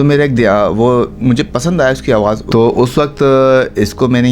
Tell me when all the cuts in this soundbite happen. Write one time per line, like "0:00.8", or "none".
0:02.4